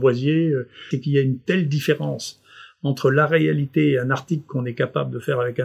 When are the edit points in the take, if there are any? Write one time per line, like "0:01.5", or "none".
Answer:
0:00.9